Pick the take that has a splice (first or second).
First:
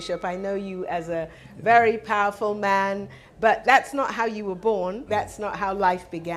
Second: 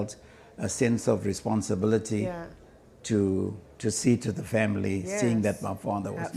first